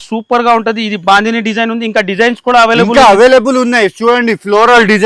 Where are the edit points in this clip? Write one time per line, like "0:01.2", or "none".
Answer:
none